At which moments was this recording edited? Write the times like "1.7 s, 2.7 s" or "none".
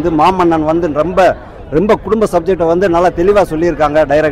none